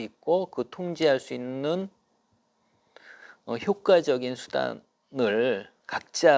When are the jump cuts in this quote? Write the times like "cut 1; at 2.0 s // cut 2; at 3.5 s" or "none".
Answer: none